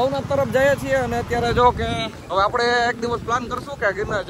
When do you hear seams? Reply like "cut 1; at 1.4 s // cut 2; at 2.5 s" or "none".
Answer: cut 1; at 2.1 s